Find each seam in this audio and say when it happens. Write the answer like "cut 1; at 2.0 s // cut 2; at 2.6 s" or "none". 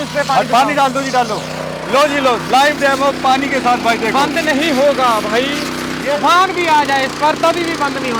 cut 1; at 1.8 s // cut 2; at 6.0 s